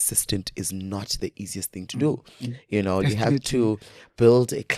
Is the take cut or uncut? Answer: uncut